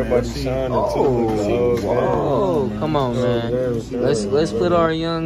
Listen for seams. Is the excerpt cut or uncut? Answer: uncut